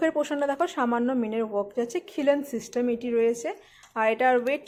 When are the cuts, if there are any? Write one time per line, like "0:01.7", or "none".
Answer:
none